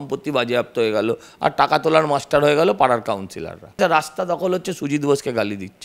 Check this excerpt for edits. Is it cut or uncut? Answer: cut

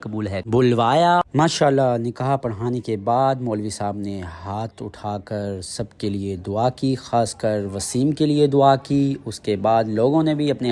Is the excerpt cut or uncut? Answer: uncut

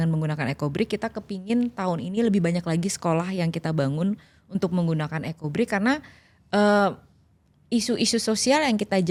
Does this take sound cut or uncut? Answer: uncut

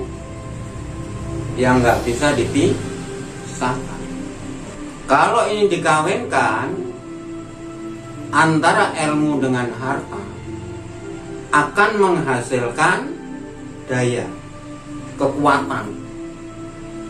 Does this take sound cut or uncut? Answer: uncut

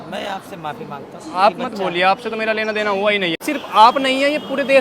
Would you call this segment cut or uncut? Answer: cut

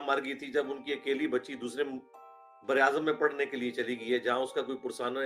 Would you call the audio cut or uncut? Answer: uncut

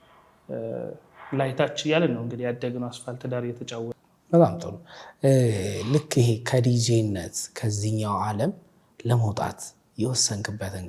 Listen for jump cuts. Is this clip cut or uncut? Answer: cut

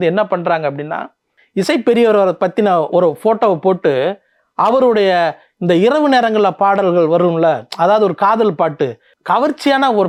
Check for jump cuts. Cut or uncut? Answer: uncut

